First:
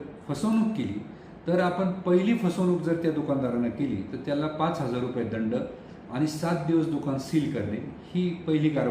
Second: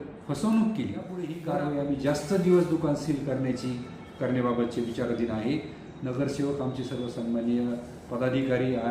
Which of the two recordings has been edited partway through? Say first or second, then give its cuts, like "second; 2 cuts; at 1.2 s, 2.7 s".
second; 1 cut; at 1.4 s